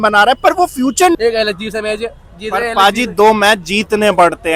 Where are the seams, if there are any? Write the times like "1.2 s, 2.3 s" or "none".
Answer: 1.2 s